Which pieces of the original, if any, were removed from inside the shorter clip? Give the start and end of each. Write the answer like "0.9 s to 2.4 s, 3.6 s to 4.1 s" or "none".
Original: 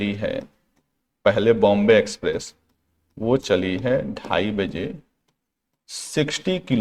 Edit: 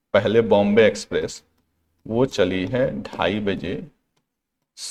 none